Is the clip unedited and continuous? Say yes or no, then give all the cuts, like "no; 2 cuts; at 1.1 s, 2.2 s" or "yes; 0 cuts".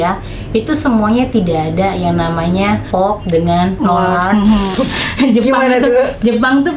no; 3 cuts; at 2.8 s, 3.8 s, 4.7 s